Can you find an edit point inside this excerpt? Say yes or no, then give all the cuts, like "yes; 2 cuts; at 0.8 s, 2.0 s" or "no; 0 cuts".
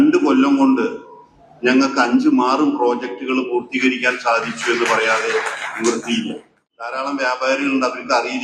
yes; 1 cut; at 7.0 s